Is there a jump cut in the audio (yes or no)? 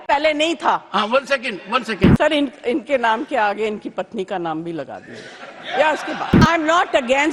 yes